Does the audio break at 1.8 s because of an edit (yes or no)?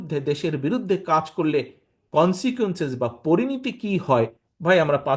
no